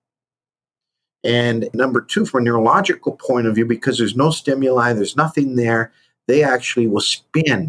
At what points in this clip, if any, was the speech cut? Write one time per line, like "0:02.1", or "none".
0:01.7